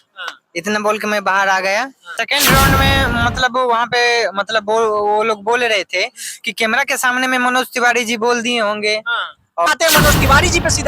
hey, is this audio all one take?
no; 2 cuts; at 2.2 s, 9.7 s

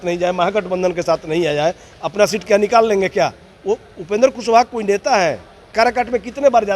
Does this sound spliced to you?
yes; 1 cut; at 5.7 s

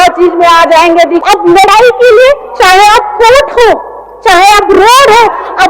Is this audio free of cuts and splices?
no; 1 cut; at 1.2 s

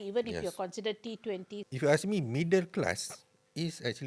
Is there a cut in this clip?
yes; 1 cut; at 1.5 s

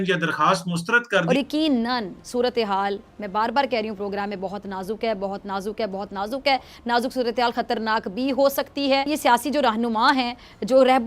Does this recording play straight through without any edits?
no; 1 cut; at 1.2 s

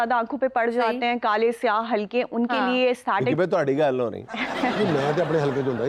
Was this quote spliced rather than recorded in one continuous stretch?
no; 0 cuts

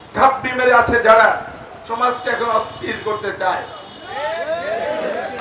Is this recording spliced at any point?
no; 0 cuts

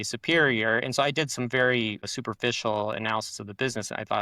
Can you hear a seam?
yes; 1 cut; at 2.1 s

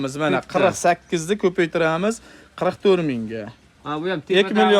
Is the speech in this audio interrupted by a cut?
no; 0 cuts

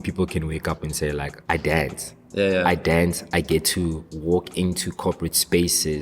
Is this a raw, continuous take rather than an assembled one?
no; 2 cuts; at 1.3 s, 4.1 s

